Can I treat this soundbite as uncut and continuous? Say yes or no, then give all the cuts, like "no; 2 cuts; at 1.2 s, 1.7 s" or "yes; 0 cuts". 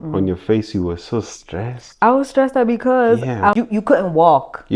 no; 1 cut; at 3.5 s